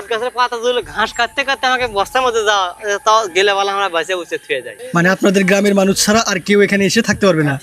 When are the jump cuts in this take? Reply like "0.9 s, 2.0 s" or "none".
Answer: 4.8 s